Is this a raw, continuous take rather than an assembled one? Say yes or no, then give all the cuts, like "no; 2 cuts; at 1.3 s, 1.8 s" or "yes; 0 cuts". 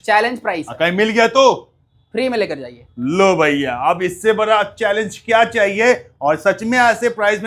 yes; 0 cuts